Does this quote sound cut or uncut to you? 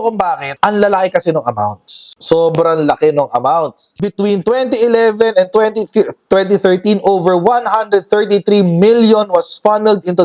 cut